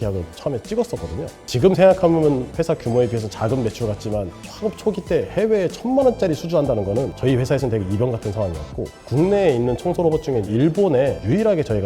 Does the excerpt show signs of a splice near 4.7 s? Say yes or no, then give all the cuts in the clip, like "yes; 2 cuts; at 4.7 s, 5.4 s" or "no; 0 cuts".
no; 1 cut; at 9.0 s